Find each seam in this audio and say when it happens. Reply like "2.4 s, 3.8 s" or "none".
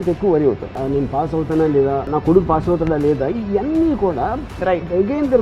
0.8 s, 2.1 s